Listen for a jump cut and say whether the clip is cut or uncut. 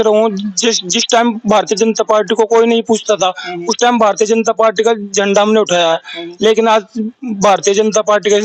uncut